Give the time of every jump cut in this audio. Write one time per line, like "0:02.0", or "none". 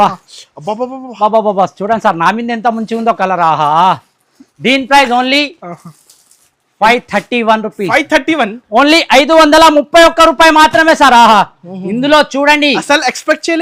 none